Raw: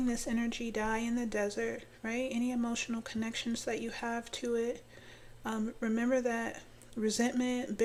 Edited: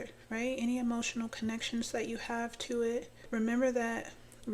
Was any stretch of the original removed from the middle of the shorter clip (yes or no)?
yes